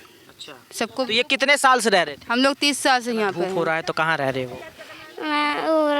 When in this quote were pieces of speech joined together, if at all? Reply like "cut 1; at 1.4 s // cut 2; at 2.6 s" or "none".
cut 1; at 3.5 s